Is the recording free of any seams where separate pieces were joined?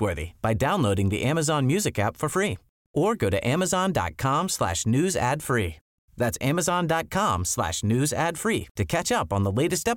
yes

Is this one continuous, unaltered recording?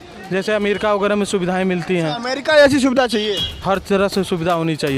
yes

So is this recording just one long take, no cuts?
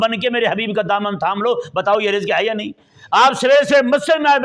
yes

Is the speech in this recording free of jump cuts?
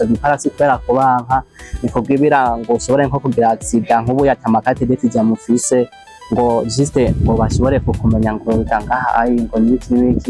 yes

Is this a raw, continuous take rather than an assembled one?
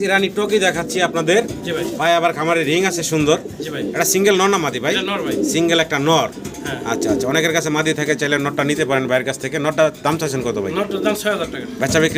yes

